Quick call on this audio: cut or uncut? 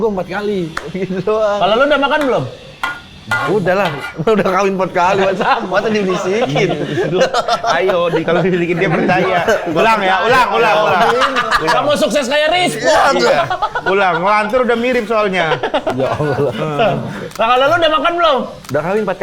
uncut